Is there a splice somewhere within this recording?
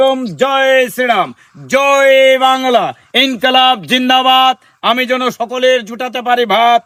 no; 0 cuts

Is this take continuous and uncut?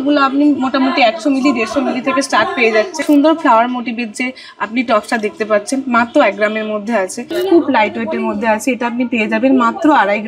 no; 2 cuts; at 3.0 s, 7.3 s

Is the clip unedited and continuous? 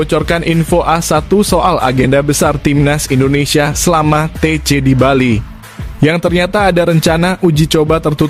yes; 0 cuts

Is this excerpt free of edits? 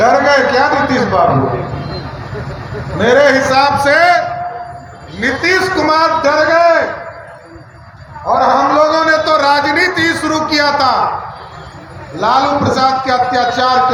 yes; 0 cuts

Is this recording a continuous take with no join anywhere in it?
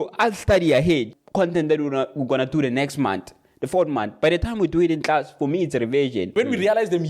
no; 2 cuts; at 1.1 s, 6.3 s

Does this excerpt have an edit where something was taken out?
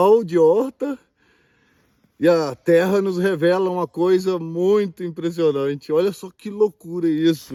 no; 0 cuts

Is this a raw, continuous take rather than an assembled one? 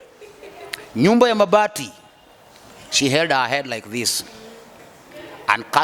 yes; 0 cuts

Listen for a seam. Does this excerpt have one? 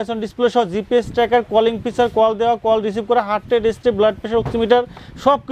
no; 0 cuts

